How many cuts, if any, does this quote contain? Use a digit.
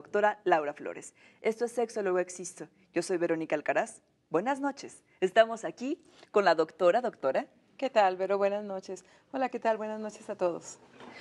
0